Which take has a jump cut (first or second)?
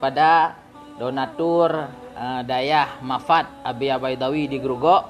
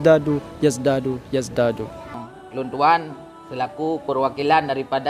second